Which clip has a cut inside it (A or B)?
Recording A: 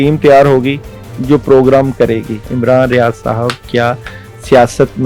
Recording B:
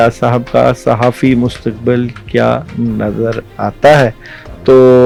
A